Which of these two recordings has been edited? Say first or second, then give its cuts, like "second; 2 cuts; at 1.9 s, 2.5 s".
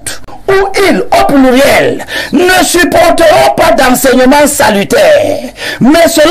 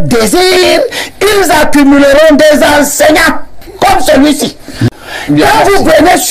second; 1 cut; at 4.9 s